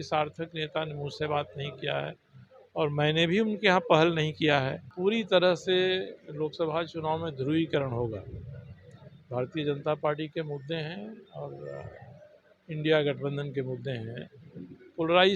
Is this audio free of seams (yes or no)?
no